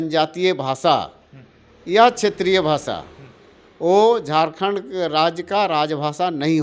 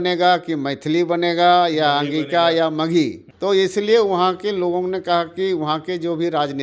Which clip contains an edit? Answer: second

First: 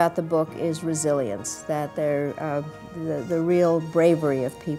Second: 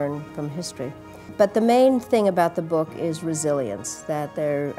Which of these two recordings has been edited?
second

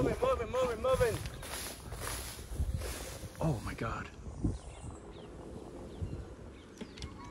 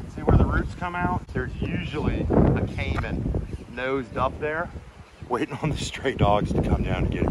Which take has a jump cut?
second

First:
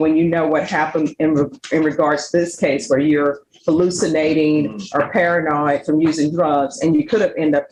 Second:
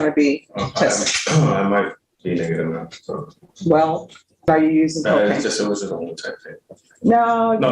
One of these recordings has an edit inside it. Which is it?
second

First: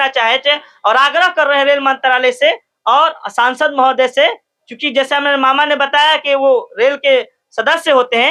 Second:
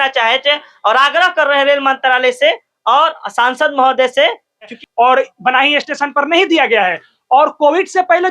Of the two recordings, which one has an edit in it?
second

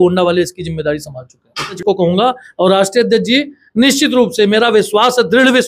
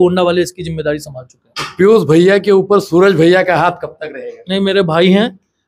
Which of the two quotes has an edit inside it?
first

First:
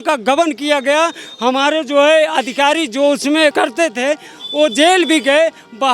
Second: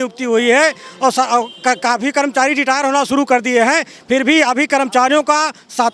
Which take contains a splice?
first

